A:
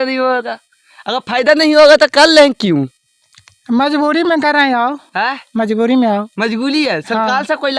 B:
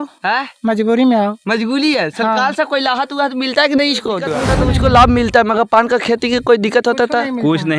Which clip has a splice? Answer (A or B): B